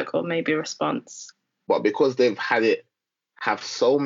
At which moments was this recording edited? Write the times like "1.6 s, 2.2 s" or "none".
1.6 s